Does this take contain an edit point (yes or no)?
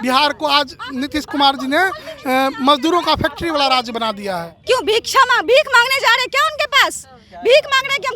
yes